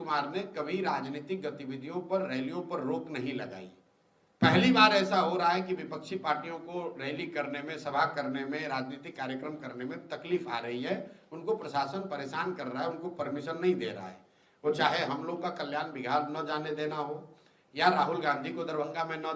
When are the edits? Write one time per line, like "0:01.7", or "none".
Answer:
none